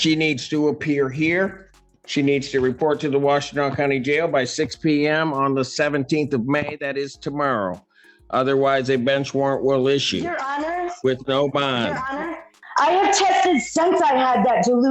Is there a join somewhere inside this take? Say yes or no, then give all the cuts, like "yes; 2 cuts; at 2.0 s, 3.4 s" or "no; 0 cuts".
yes; 1 cut; at 12.6 s